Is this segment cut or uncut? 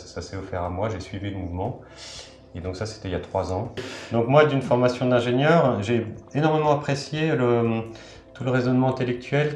cut